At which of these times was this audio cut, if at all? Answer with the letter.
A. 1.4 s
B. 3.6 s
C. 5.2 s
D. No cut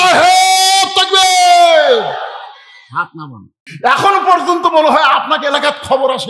B